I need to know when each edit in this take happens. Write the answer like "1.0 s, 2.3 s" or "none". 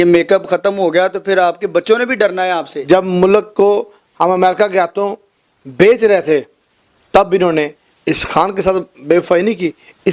2.7 s